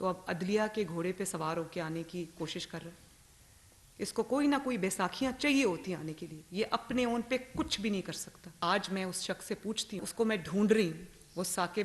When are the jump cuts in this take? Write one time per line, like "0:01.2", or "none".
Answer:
0:08.6
0:10.0